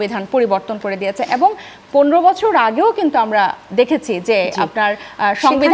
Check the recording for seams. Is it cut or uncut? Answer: uncut